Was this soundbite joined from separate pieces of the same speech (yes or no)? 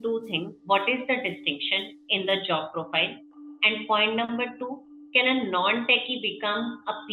no